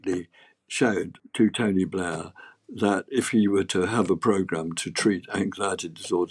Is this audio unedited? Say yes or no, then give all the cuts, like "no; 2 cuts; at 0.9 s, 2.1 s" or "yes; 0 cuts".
yes; 0 cuts